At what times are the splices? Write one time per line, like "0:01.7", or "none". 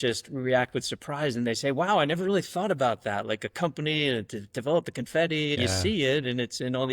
0:05.6